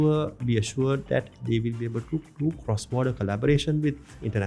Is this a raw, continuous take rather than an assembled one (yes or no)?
yes